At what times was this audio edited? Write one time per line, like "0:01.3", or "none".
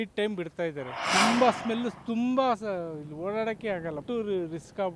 0:01.0
0:04.0